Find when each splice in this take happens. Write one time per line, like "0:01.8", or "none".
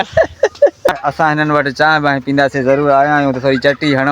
0:00.9